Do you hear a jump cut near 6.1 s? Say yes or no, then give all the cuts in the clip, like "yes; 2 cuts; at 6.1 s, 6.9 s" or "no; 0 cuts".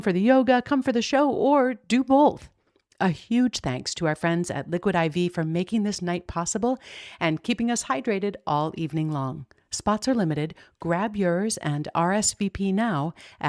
no; 0 cuts